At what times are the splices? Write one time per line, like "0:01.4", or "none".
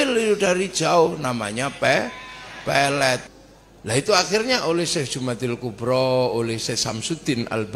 0:03.2